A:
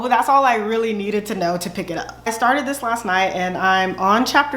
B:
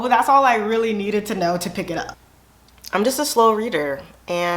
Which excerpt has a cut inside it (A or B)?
B